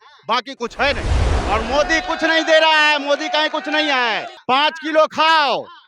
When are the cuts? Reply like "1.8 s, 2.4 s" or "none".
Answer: 1.3 s, 4.3 s